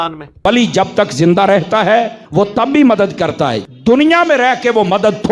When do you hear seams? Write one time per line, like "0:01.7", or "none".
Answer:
none

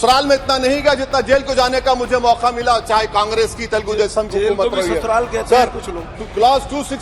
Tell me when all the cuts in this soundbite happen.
none

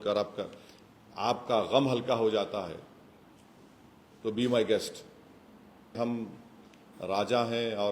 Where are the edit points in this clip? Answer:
0:06.0

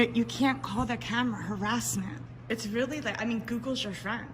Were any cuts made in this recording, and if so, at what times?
0:02.3

